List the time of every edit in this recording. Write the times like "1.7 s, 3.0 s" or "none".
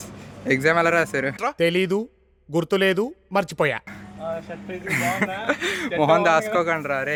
none